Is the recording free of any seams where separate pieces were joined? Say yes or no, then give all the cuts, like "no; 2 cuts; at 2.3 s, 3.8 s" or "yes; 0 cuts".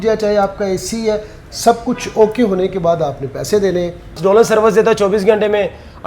no; 1 cut; at 4.2 s